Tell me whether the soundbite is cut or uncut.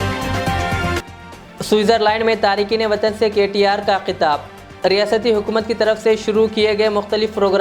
cut